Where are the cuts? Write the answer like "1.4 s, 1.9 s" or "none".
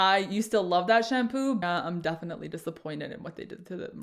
1.6 s